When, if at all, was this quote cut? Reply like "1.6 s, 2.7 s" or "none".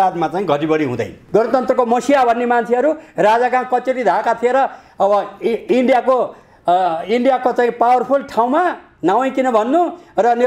1.2 s

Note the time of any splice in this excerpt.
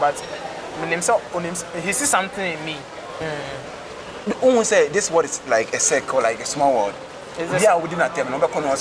3.1 s

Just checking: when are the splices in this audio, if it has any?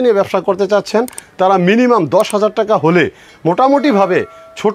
none

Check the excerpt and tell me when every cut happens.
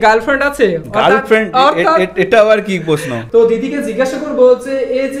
3.1 s

